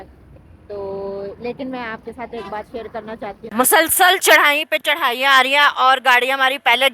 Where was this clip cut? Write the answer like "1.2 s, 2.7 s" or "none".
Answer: 3.4 s